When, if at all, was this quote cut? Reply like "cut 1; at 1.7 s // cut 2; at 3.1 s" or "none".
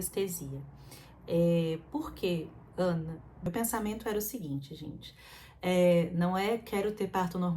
cut 1; at 3.4 s